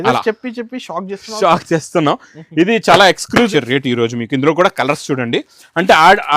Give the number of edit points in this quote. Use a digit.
1